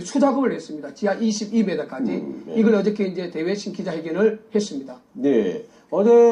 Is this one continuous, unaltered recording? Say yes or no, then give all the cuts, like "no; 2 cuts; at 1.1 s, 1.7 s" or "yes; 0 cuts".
yes; 0 cuts